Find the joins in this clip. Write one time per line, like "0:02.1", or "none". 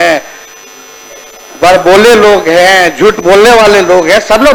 none